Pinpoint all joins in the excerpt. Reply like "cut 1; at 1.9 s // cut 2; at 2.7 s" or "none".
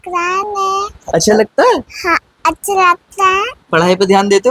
cut 1; at 1.0 s